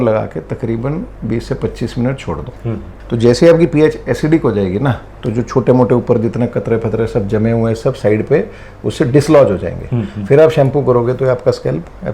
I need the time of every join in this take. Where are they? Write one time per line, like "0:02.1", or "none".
none